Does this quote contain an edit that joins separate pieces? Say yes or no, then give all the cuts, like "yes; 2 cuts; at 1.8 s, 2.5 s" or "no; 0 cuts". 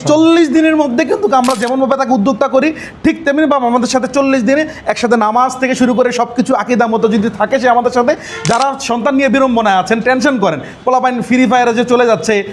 no; 0 cuts